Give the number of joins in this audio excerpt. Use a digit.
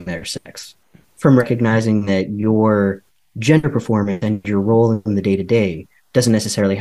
0